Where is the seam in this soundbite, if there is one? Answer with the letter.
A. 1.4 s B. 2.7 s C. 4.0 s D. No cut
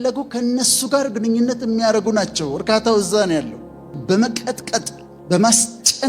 C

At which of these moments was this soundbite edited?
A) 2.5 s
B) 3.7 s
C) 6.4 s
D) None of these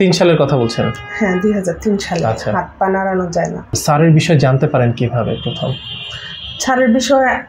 B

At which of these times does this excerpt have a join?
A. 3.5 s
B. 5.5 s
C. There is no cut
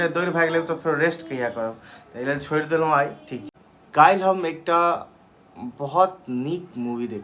A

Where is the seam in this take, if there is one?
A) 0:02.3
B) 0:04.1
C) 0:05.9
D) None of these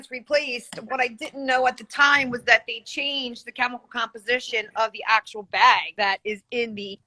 C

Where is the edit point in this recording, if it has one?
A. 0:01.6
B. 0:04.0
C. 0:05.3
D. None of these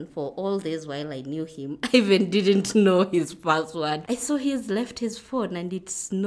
B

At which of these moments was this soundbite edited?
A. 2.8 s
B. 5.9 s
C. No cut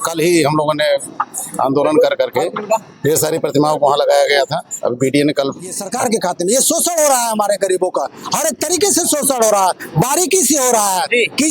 B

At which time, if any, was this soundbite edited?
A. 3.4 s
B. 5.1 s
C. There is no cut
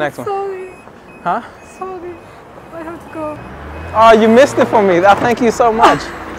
A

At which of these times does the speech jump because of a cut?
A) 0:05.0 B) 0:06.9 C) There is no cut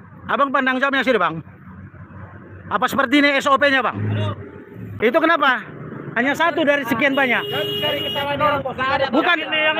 A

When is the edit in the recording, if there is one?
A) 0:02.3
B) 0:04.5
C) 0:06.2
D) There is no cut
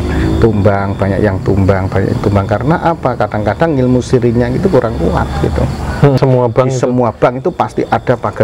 C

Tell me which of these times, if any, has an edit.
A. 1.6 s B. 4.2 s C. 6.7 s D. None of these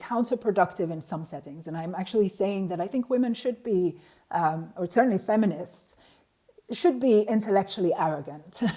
D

